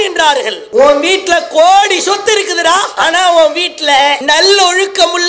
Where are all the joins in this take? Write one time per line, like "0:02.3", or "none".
0:04.2